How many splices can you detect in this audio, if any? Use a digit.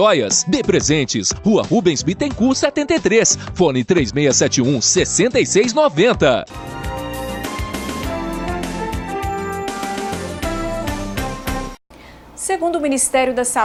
0